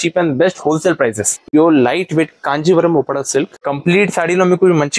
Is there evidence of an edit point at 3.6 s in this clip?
yes; 2 cuts; at 1.4 s, 3.6 s

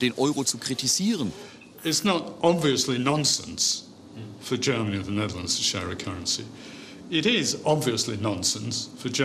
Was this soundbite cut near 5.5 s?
no; 1 cut; at 1.4 s

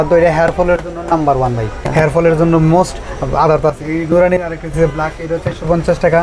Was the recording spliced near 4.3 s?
no; 1 cut; at 1.8 s

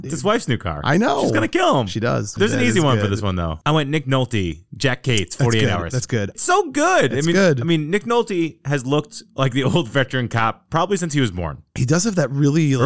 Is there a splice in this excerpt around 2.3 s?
yes; 3 cuts; at 2.3 s, 3.6 s, 6.4 s

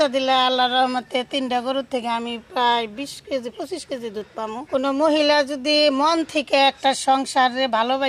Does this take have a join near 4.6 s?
yes; 1 cut; at 4.6 s

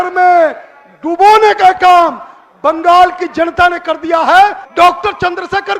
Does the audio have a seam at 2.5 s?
no; 1 cut; at 4.6 s

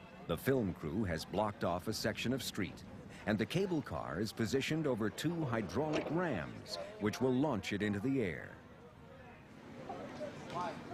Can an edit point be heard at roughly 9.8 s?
yes; 1 cut; at 9.8 s

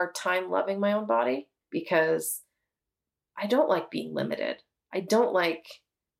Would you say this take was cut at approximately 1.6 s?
yes; 1 cut; at 1.6 s

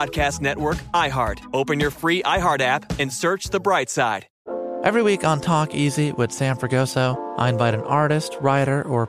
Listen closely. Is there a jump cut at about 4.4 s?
yes; 1 cut; at 4.4 s

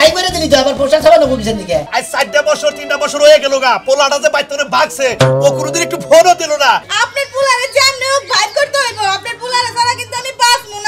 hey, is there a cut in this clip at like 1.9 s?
yes; 2 cuts; at 1.9 s, 6.9 s

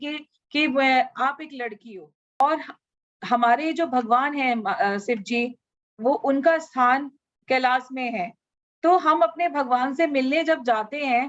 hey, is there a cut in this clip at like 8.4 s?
no; 1 cut; at 2.4 s

